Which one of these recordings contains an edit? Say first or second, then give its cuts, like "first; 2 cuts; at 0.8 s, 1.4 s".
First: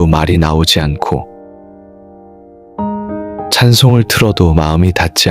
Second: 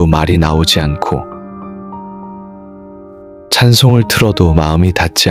first; 2 cuts; at 1.7 s, 3.5 s